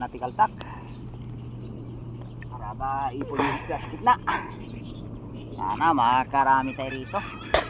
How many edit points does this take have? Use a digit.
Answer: 0